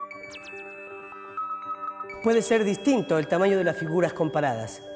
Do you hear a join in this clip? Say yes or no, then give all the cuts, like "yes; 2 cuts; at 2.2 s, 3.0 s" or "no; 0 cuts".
no; 0 cuts